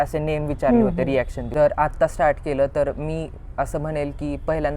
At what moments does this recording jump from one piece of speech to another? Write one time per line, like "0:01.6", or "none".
0:01.4